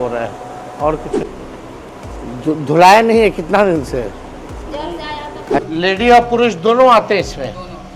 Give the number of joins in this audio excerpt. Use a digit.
2